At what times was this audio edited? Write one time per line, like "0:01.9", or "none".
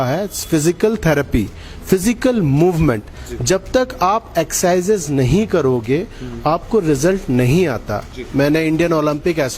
0:08.1